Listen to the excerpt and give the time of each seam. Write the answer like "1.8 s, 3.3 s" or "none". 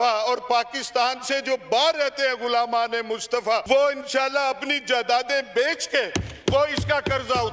3.6 s